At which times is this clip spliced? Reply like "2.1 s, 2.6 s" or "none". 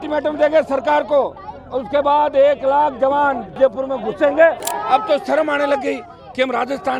3.5 s, 4.7 s